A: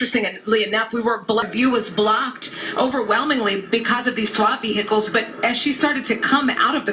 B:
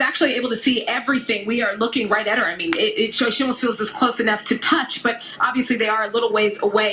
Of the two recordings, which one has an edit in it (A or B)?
A